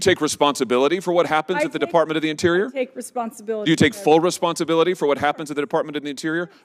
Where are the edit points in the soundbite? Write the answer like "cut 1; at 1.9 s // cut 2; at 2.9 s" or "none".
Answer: none